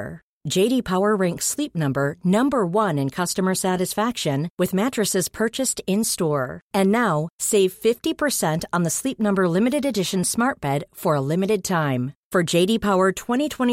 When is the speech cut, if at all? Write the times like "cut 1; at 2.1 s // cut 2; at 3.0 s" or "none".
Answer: none

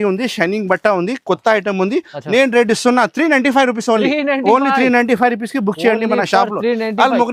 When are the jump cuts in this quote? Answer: none

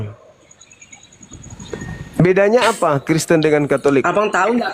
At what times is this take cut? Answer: cut 1; at 1.5 s

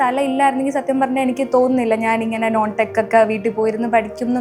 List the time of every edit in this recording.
none

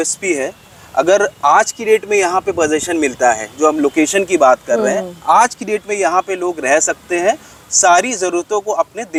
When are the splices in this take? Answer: none

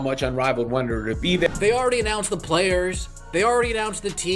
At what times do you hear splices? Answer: cut 1; at 1.5 s

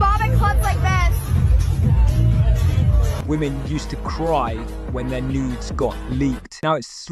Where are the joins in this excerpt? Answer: none

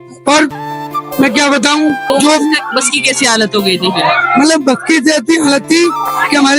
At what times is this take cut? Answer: cut 1; at 2.1 s

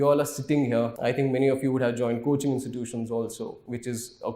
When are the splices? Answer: cut 1; at 0.9 s

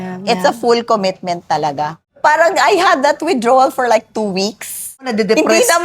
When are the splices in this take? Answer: cut 1; at 2.0 s // cut 2; at 5.1 s

